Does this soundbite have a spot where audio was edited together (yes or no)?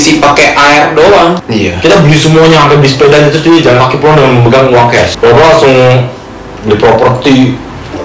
yes